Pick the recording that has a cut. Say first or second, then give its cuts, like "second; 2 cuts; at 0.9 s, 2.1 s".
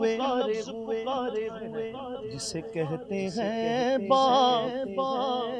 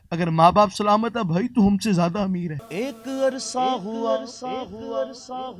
second; 1 cut; at 2.6 s